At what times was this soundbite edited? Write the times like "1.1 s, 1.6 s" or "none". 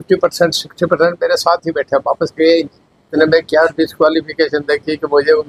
3.1 s